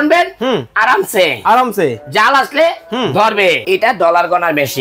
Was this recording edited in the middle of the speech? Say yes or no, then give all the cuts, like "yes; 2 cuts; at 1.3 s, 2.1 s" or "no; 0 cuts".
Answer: yes; 1 cut; at 3.6 s